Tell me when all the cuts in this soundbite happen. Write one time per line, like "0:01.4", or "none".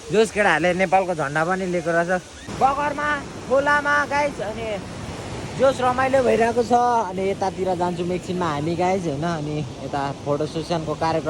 0:02.4

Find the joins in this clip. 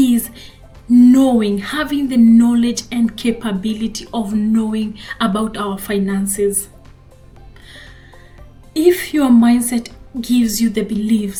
none

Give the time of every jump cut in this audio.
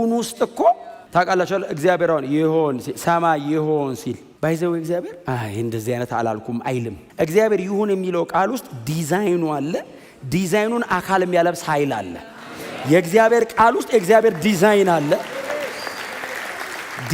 0:00.9
0:04.3
0:07.0

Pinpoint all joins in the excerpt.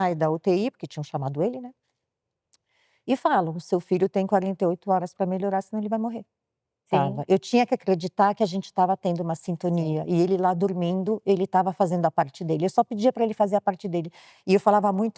0:06.9

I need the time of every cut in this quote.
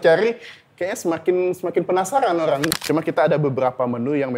0:02.8

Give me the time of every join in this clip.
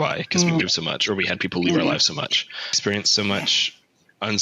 0:02.8

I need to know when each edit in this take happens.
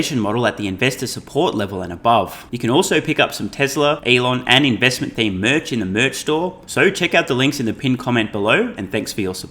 0:02.5
0:04.0
0:06.6

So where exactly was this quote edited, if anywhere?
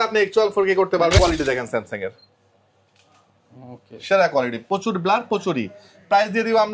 0:01.2

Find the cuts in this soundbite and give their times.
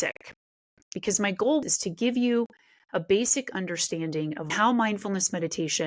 0:01.6
0:04.5

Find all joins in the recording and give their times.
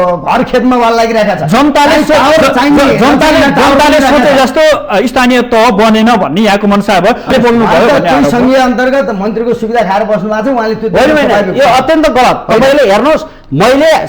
0:07.3

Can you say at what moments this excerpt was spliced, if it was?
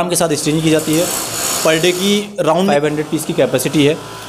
0:02.6

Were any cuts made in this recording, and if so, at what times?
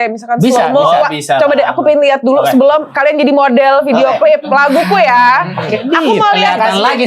none

